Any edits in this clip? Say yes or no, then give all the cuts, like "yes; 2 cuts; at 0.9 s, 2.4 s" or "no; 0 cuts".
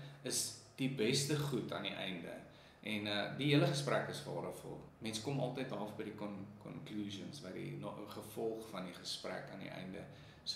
yes; 1 cut; at 4.9 s